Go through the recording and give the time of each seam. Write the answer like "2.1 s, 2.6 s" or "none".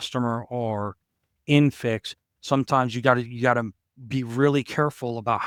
none